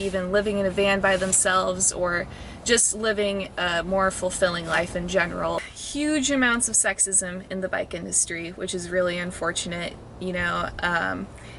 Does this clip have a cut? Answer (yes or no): yes